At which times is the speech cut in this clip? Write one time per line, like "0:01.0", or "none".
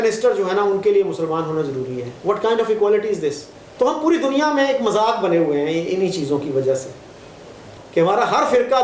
0:03.3
0:07.7